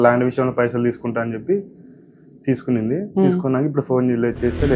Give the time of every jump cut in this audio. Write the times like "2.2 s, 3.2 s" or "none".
none